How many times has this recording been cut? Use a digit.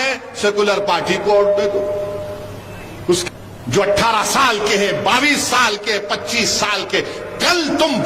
1